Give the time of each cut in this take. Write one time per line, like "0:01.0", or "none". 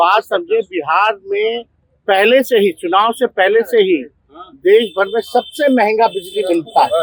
none